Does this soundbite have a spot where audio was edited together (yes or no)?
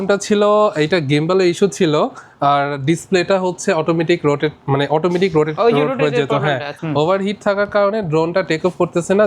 yes